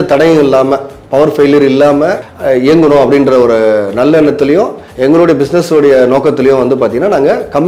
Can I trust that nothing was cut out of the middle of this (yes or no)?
yes